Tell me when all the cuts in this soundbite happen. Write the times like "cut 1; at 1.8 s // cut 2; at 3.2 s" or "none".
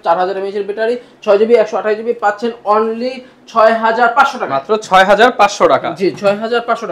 none